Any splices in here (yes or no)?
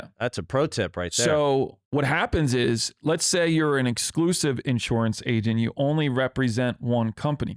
yes